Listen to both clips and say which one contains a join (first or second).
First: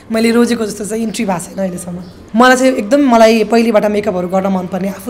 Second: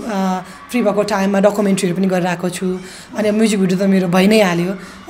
first